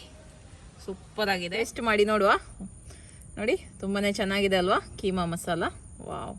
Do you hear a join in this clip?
yes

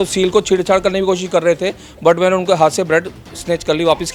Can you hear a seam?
no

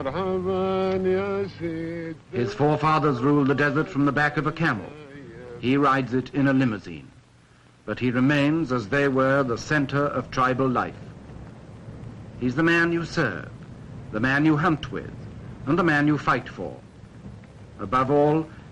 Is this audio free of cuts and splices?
no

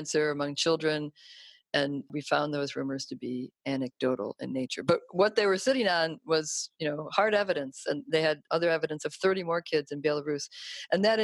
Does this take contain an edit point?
no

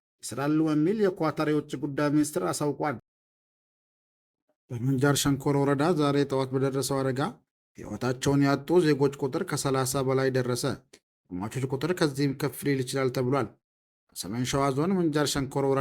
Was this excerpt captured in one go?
no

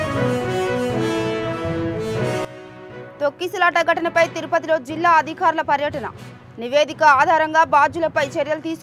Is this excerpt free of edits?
yes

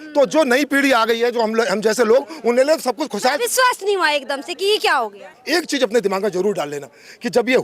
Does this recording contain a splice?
yes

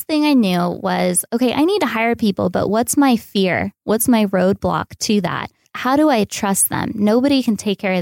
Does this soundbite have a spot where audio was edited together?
yes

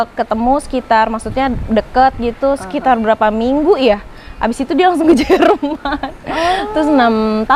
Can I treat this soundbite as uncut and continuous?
yes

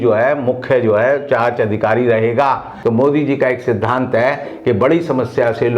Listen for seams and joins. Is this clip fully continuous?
no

